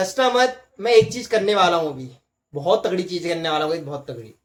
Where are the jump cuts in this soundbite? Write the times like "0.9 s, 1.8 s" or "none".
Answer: none